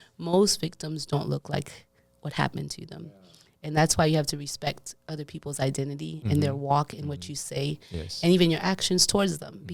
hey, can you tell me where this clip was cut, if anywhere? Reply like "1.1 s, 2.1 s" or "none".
none